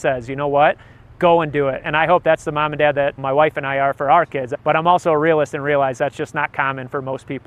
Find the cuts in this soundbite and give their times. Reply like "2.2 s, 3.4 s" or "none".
3.2 s, 4.5 s